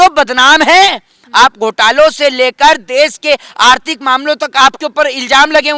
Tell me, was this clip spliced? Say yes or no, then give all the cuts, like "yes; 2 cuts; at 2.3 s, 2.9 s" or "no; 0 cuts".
no; 0 cuts